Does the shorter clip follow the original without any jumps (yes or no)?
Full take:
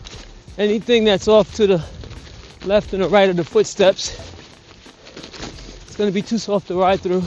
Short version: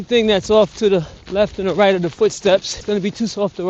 no